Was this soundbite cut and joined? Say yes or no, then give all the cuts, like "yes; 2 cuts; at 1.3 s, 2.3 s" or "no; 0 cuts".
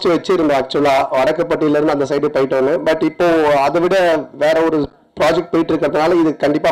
no; 0 cuts